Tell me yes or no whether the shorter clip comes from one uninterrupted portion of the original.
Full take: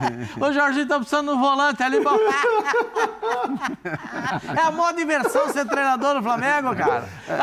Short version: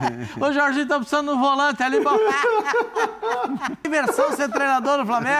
no